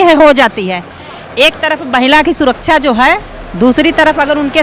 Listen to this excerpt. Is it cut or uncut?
uncut